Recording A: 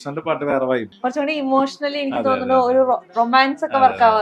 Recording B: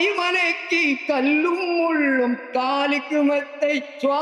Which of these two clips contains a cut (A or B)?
A